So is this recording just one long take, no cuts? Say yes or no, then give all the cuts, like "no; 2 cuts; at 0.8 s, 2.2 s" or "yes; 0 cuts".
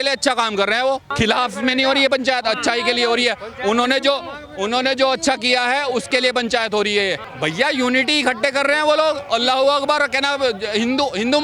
no; 2 cuts; at 1.1 s, 7.3 s